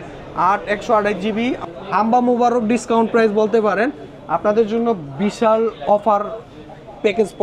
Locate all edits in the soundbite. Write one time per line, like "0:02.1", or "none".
0:01.6